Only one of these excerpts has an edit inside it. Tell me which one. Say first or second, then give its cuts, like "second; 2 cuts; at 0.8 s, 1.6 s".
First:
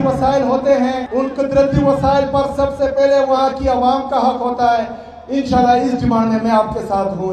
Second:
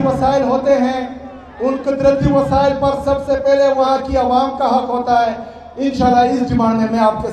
first; 1 cut; at 1.0 s